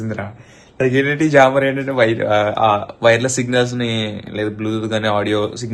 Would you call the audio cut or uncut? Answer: uncut